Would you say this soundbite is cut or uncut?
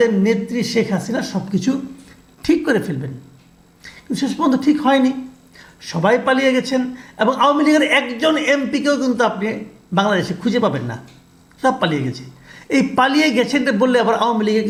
uncut